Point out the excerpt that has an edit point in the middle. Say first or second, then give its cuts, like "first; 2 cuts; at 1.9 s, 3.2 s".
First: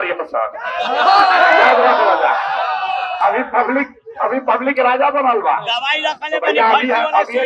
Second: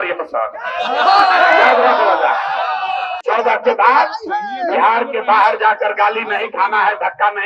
second; 1 cut; at 3.1 s